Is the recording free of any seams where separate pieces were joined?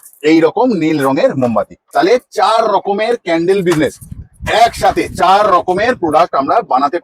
no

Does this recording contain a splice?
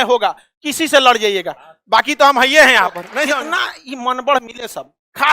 yes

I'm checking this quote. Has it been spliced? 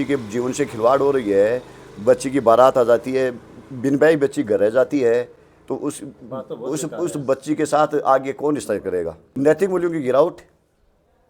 no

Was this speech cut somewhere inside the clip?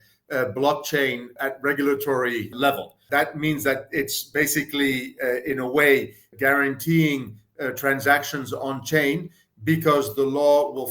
yes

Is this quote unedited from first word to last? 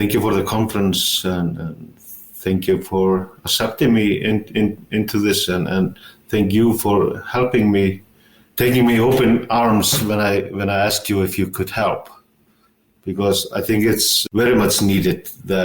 no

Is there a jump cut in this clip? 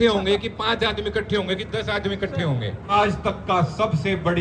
yes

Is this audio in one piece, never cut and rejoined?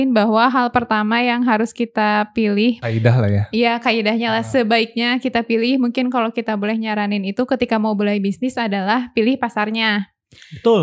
no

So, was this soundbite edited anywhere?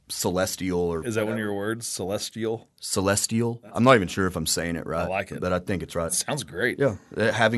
yes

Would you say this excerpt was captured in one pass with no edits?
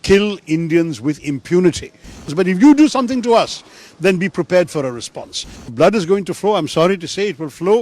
no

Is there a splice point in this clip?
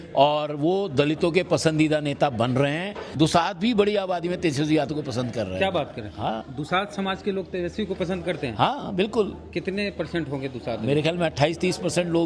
yes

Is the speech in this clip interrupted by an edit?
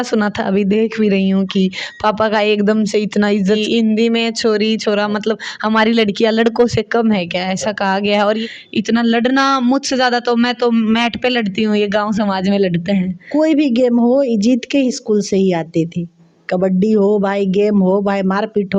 yes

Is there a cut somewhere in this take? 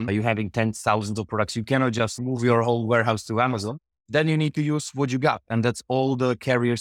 no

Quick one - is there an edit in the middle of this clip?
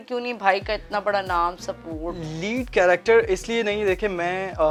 no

